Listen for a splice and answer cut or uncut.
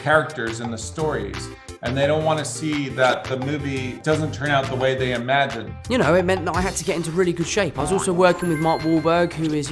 cut